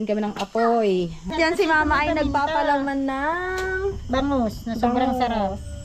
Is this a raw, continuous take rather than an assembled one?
no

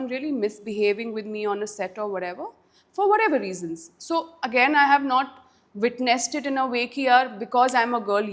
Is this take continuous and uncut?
yes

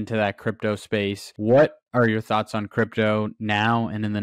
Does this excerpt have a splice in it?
no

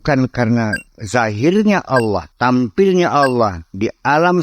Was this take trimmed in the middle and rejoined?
yes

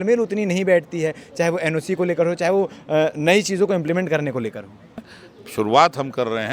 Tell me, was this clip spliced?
yes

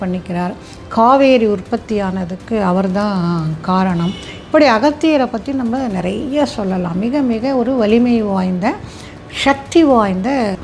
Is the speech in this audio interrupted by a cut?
no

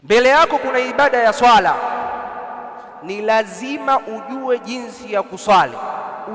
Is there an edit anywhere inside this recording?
no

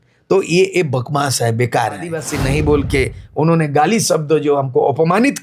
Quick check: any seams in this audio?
yes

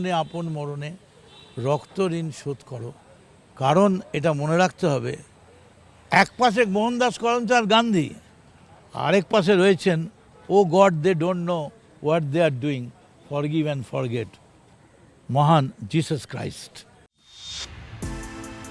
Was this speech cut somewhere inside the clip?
no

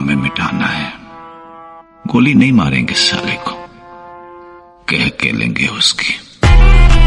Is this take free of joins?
yes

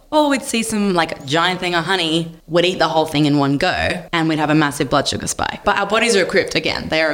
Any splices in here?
yes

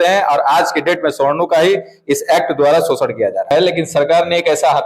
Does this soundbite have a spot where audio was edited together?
yes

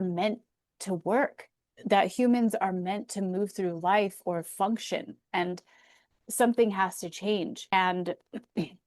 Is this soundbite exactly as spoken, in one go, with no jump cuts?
no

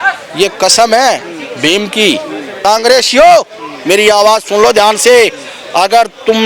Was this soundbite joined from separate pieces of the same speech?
yes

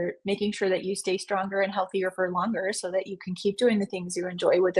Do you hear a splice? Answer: no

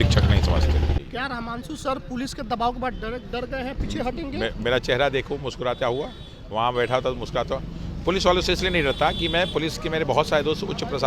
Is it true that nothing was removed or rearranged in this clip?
no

